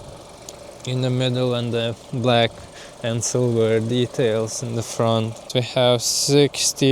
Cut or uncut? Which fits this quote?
cut